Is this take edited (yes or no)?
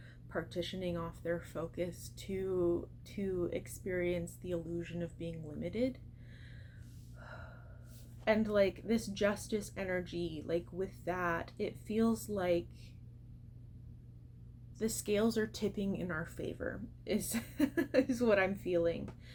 no